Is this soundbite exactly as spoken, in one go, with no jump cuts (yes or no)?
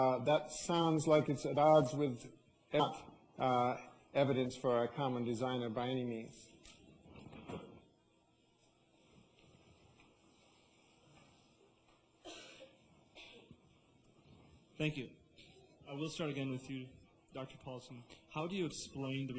yes